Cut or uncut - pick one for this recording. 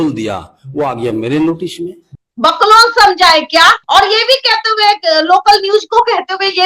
uncut